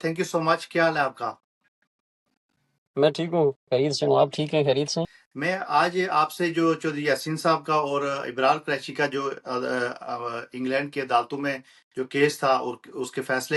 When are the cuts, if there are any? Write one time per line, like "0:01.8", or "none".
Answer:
0:05.2